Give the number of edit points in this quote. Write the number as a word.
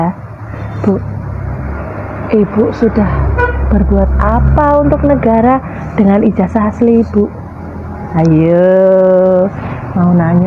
zero